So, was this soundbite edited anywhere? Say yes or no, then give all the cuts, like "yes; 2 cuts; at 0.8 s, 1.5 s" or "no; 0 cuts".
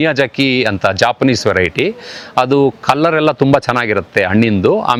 no; 0 cuts